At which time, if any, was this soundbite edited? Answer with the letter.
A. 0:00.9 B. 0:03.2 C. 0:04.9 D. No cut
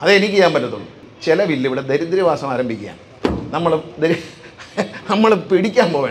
A